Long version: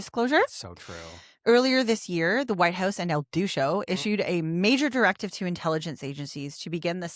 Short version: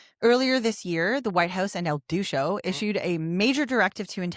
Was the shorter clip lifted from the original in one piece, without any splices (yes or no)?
yes